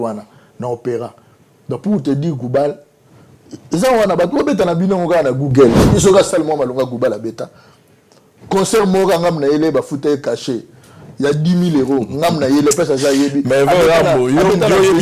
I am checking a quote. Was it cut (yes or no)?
yes